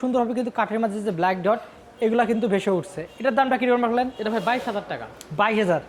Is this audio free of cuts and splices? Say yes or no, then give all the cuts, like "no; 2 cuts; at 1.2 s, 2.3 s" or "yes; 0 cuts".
yes; 0 cuts